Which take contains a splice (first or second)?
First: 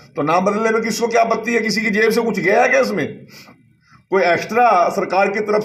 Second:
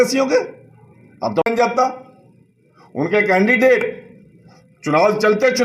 second